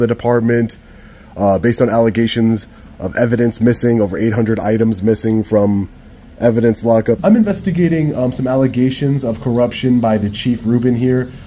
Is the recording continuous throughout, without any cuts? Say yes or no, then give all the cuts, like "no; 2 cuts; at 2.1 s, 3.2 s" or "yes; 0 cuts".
no; 1 cut; at 7.2 s